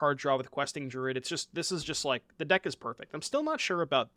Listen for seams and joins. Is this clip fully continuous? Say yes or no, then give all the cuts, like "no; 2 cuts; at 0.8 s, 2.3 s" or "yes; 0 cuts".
yes; 0 cuts